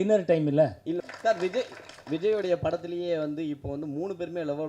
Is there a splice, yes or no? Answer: yes